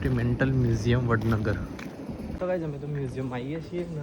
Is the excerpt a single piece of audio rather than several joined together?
no; 1 cut; at 2.4 s

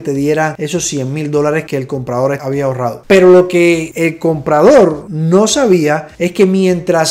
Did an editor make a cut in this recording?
no; 0 cuts

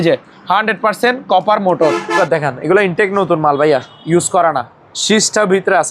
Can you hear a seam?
yes; 1 cut; at 2.2 s

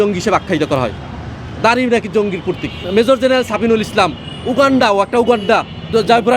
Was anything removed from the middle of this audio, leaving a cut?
no; 0 cuts

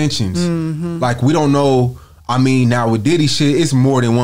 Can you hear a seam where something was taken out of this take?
no; 0 cuts

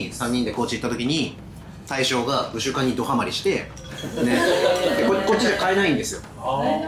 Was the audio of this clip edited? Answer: no; 0 cuts

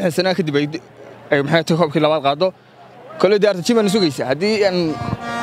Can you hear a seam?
no; 0 cuts

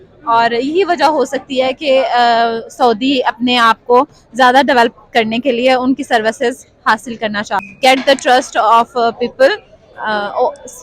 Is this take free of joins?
no; 1 cut; at 7.6 s

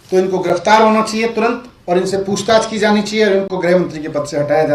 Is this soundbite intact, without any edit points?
yes; 0 cuts

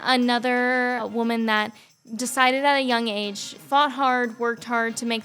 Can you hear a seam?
yes; 2 cuts; at 1.1 s, 3.5 s

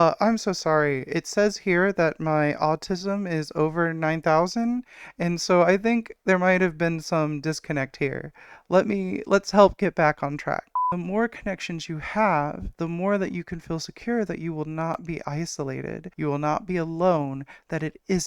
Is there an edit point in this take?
yes; 1 cut; at 10.7 s

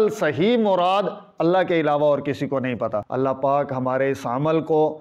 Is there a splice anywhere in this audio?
yes; 1 cut; at 3.0 s

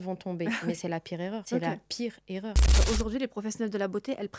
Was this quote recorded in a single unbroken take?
no; 2 cuts; at 1.4 s, 2.8 s

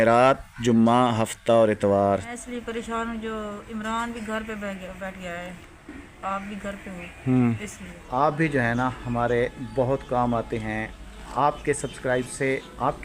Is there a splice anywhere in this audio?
yes; 2 cuts; at 2.4 s, 8.0 s

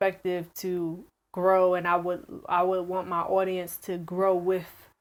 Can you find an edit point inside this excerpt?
no; 0 cuts

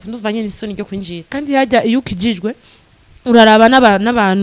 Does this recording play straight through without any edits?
no; 1 cut; at 1.2 s

